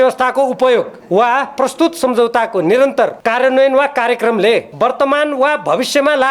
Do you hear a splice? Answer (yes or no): yes